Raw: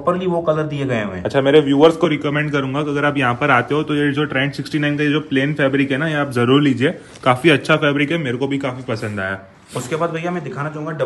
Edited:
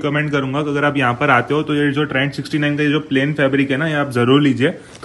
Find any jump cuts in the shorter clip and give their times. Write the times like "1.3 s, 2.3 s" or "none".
none